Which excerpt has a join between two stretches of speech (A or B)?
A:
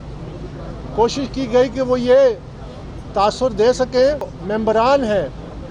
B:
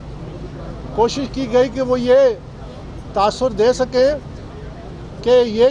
A